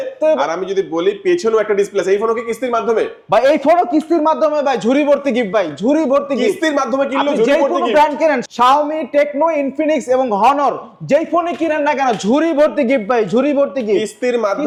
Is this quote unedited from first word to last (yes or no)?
yes